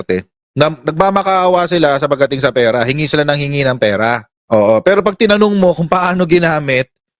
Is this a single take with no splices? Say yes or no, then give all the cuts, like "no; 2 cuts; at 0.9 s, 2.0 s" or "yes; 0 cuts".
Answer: yes; 0 cuts